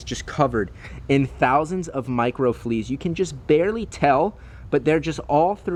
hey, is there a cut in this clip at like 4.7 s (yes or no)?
no